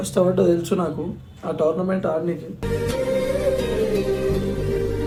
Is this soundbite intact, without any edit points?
yes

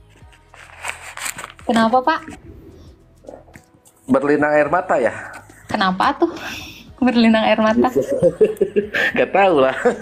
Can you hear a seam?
no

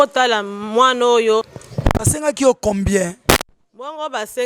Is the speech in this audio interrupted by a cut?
yes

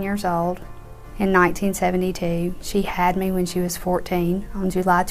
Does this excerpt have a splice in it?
no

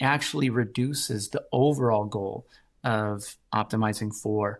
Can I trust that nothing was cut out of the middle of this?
yes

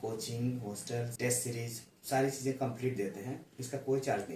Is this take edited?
yes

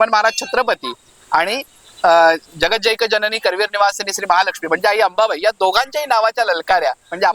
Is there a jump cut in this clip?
no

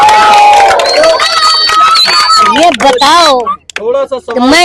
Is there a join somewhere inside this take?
no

